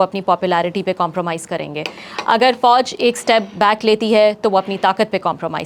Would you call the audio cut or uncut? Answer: uncut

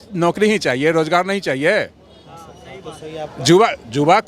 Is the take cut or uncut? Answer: uncut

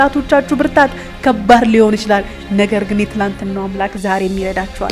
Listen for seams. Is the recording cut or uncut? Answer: uncut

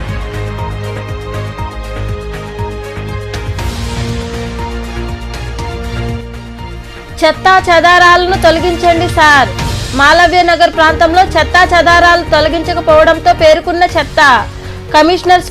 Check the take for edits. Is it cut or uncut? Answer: cut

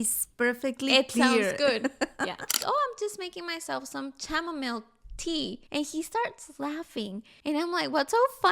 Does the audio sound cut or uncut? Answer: cut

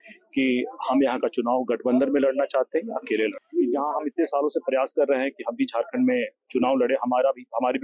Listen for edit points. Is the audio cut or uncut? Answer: cut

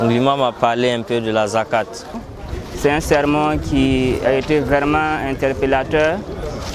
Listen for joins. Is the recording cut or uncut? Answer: cut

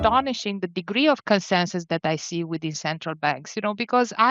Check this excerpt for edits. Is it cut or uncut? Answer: uncut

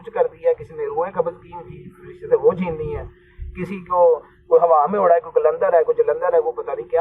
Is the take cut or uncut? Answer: uncut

